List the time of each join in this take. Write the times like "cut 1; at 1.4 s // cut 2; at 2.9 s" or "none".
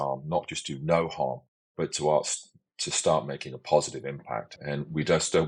cut 1; at 4.6 s

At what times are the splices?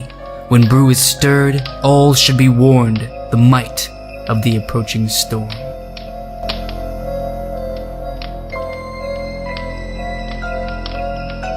cut 1; at 5.5 s

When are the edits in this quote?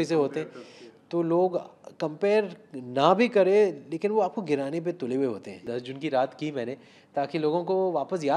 cut 1; at 5.7 s

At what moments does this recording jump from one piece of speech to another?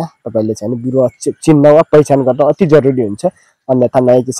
none

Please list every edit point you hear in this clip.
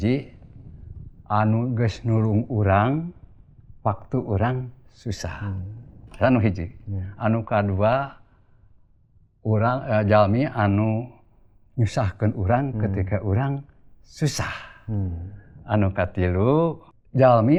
none

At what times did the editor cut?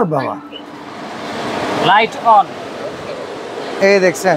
none

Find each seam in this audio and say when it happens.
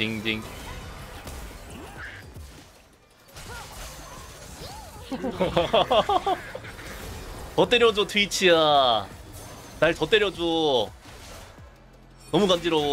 none

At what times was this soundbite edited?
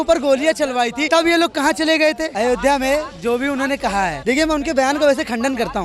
cut 1; at 1.0 s // cut 2; at 2.3 s // cut 3; at 4.2 s

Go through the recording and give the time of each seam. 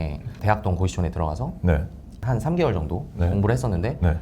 cut 1; at 2.1 s

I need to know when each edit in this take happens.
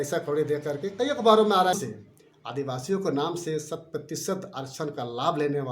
cut 1; at 1.7 s

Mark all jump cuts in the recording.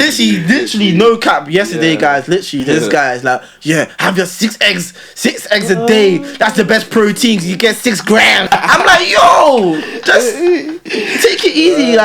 cut 1; at 8.4 s

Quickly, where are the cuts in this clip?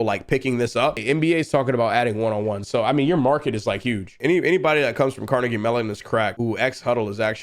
cut 1; at 1.0 s // cut 2; at 4.1 s // cut 3; at 6.3 s

